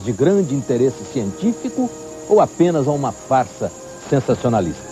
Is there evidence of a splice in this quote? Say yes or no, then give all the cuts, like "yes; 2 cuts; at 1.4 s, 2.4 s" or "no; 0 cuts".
yes; 1 cut; at 3.1 s